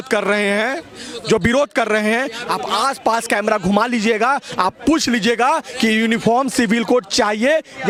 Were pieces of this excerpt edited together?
no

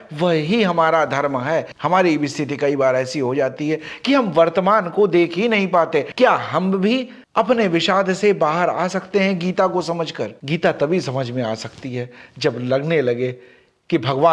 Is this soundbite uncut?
no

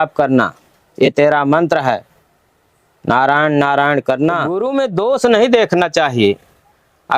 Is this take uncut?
no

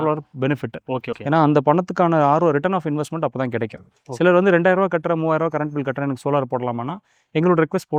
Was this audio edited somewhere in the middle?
no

